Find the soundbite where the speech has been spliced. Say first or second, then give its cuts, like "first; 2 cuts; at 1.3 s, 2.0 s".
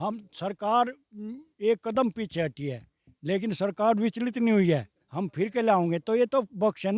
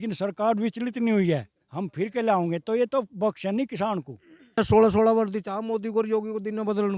second; 1 cut; at 4.6 s